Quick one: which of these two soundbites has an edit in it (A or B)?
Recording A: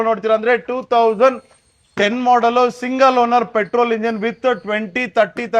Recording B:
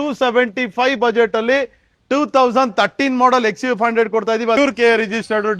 B